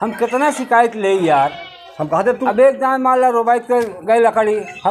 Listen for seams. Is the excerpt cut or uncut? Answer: uncut